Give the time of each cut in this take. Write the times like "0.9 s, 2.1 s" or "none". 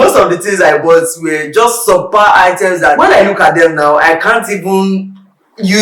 3.0 s